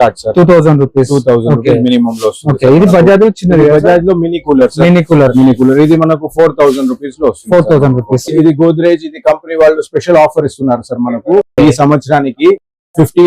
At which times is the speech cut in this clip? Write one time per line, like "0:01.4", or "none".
0:08.3